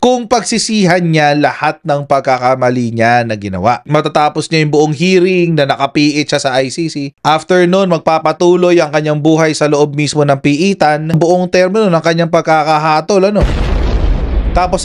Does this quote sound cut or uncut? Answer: cut